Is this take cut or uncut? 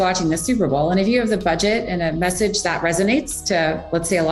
uncut